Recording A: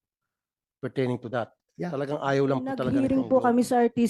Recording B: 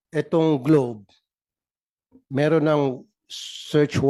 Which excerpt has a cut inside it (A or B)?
A